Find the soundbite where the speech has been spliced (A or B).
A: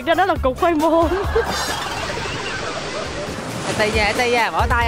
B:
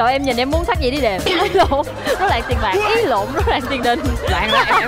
A